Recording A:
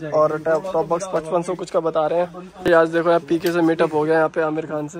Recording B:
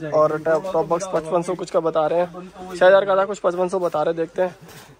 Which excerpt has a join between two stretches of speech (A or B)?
A